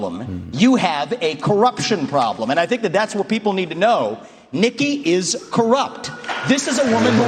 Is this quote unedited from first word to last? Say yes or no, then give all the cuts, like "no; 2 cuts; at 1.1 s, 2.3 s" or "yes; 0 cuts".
yes; 0 cuts